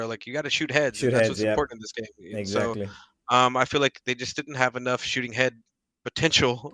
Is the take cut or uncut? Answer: uncut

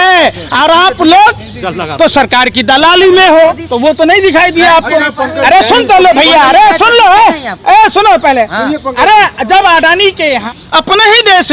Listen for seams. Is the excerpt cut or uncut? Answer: cut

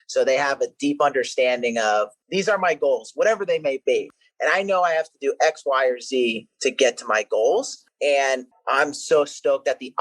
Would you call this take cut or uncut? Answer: cut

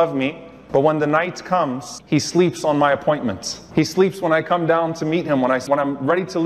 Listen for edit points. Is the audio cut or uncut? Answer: cut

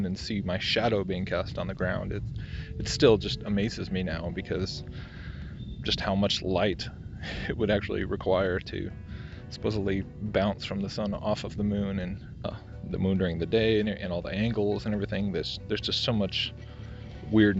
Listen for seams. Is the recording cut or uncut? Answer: uncut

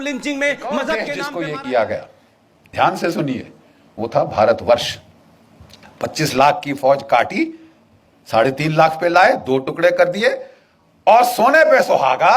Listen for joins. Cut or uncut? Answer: cut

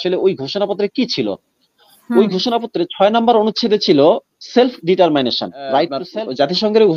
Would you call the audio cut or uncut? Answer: cut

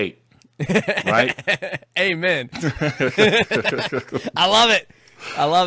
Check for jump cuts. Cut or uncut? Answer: uncut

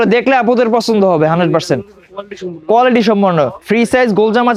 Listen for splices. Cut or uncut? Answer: uncut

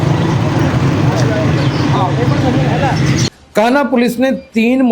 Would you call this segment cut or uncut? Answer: cut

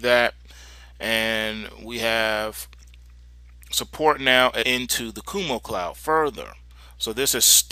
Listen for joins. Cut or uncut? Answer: uncut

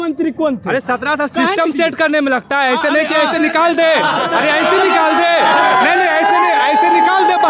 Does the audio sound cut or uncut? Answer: uncut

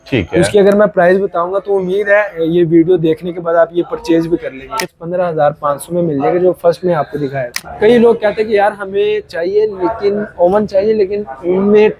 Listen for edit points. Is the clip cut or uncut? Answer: cut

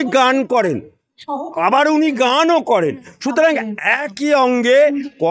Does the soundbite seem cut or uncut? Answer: uncut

